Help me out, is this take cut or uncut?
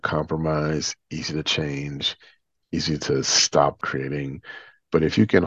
cut